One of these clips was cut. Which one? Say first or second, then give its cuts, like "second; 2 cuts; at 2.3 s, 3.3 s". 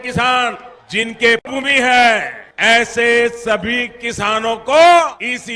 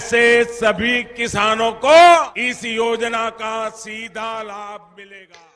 first; 1 cut; at 1.5 s